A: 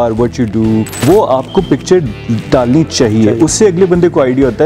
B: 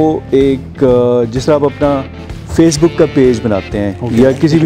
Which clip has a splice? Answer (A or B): A